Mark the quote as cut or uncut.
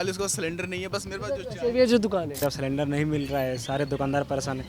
cut